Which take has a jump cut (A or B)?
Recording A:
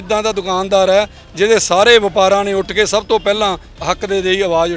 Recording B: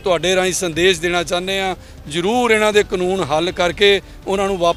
A